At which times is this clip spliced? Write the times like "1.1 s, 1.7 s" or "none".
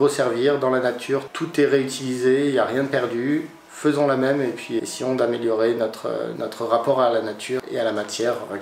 1.3 s, 4.8 s, 6.3 s, 7.6 s